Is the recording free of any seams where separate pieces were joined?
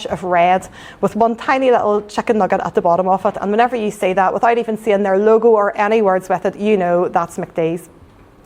yes; 0 cuts

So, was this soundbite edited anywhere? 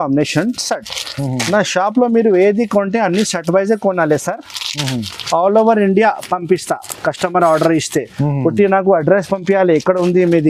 no; 0 cuts

